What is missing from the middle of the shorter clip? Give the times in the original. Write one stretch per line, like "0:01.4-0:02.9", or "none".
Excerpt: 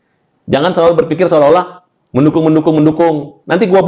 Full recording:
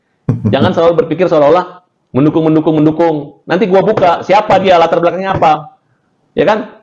none